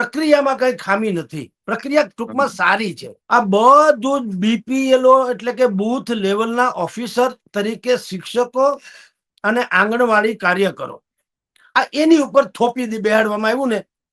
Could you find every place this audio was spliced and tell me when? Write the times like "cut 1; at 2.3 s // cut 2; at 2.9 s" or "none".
cut 1; at 3.1 s